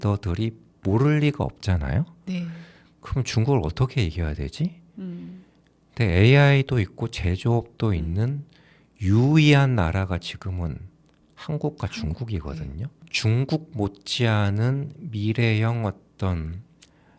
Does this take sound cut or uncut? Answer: cut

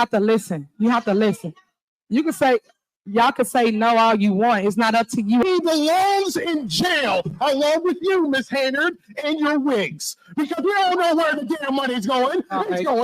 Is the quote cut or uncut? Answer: cut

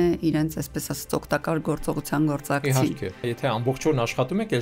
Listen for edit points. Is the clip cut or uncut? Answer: cut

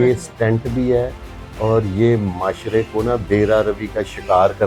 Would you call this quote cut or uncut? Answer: uncut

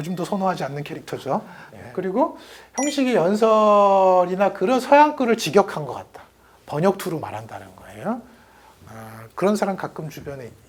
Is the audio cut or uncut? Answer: uncut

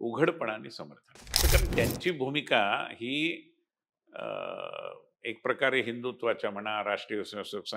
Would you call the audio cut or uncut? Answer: cut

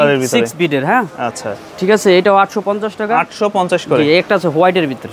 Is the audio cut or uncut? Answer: uncut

